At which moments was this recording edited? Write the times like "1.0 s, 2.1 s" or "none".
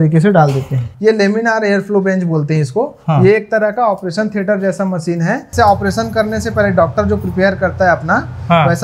0.9 s, 5.5 s